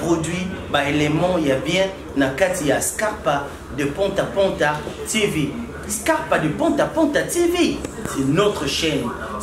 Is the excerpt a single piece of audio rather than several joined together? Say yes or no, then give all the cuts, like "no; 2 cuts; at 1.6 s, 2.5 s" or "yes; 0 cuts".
yes; 0 cuts